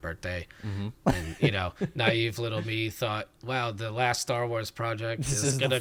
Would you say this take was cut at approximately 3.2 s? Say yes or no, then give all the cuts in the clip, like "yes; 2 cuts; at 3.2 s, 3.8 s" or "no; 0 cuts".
no; 0 cuts